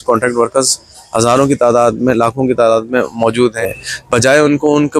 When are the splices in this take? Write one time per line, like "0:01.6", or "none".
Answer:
0:03.7